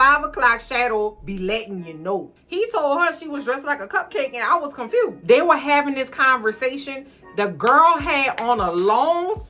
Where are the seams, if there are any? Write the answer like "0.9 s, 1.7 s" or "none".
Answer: 2.4 s, 5.2 s